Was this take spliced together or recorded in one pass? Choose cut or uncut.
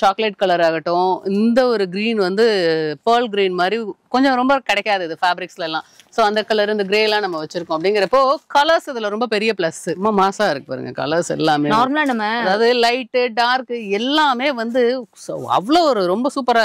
cut